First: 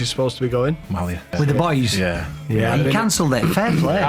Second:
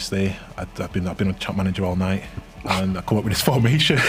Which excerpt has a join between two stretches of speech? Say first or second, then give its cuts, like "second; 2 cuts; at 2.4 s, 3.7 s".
first; 1 cut; at 1.3 s